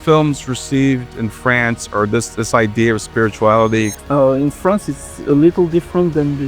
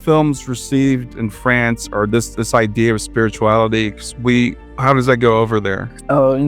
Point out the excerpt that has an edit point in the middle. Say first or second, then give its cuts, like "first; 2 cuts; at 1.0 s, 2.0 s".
first; 1 cut; at 4.0 s